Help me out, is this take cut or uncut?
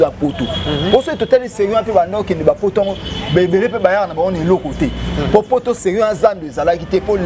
uncut